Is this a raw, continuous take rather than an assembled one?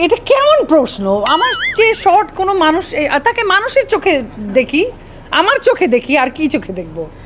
yes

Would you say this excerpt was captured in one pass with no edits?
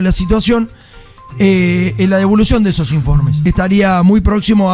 no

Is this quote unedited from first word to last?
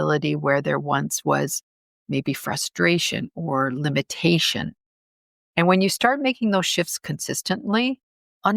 yes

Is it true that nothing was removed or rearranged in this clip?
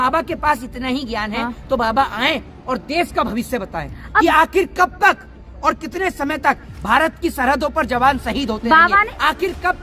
yes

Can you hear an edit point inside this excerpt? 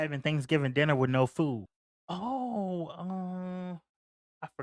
yes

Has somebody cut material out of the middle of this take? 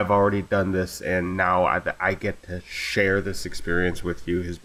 no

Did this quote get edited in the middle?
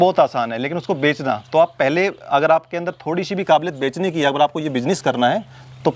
no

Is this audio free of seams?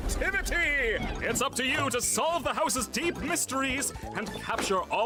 yes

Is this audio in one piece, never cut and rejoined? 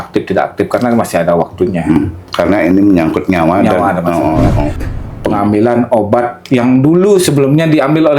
no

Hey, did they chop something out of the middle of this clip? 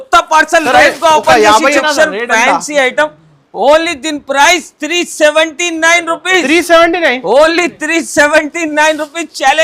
yes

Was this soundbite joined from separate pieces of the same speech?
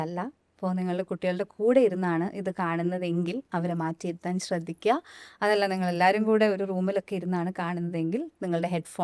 no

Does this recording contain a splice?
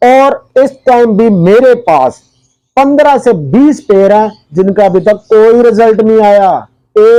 no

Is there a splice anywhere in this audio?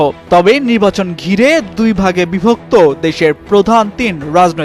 no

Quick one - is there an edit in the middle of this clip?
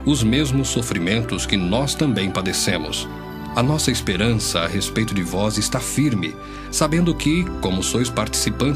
yes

